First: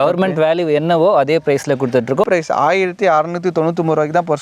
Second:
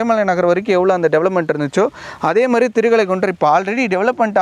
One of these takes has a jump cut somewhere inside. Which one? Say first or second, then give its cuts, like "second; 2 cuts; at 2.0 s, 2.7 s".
first; 1 cut; at 2.2 s